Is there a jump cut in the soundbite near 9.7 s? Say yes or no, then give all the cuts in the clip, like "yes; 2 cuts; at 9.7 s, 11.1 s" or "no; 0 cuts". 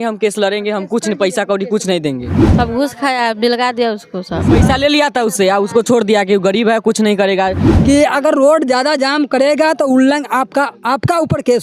no; 3 cuts; at 2.4 s, 4.4 s, 7.6 s